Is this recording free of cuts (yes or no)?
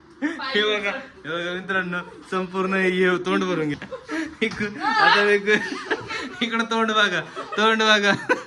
no